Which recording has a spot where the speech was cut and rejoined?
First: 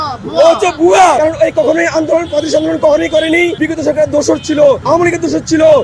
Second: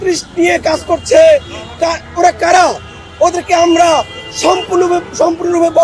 first; 3 cuts; at 1.2 s, 3.6 s, 4.8 s

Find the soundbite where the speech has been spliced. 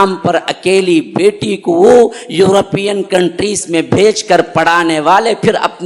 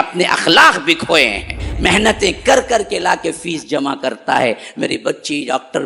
second; 1 cut; at 1.7 s

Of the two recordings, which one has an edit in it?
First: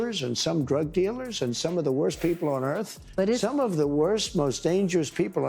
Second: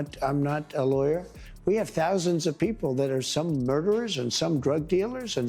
second; 1 cut; at 1.3 s

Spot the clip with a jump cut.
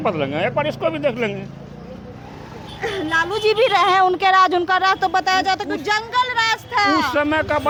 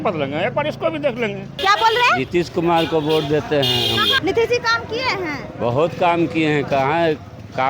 second; 2 cuts; at 1.5 s, 4.1 s

